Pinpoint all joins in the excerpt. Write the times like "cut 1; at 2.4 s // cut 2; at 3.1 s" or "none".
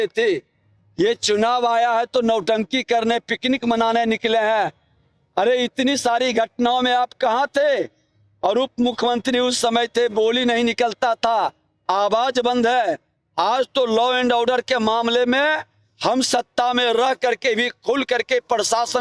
none